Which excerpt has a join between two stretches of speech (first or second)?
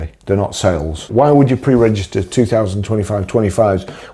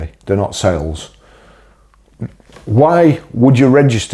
first